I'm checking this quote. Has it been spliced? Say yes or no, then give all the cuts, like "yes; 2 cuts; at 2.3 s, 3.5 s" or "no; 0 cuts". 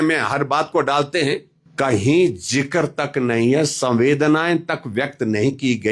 yes; 1 cut; at 1.6 s